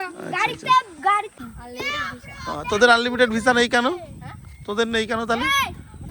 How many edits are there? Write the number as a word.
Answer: one